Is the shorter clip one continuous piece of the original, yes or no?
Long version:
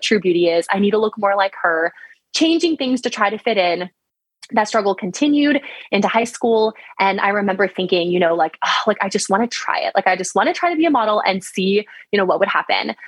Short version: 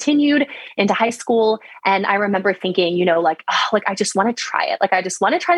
yes